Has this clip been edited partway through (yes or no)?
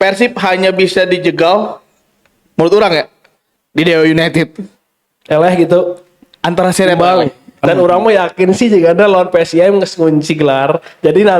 yes